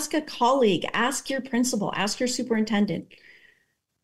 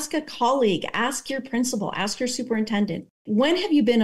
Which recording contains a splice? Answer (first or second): second